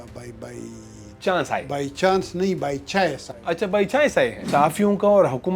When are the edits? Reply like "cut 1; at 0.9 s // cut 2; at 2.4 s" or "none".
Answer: cut 1; at 4.4 s